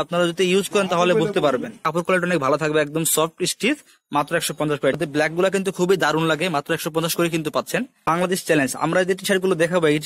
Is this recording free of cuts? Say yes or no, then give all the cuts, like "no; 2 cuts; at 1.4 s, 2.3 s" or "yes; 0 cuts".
no; 3 cuts; at 1.9 s, 5.0 s, 8.1 s